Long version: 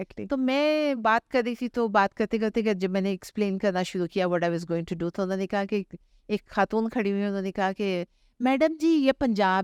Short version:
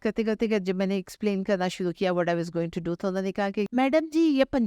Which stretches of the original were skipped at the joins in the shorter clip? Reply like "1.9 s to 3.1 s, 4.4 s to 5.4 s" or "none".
5.8 s to 8.4 s